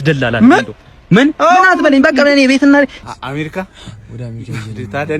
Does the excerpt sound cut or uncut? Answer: cut